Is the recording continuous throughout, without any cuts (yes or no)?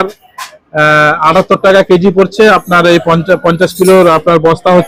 yes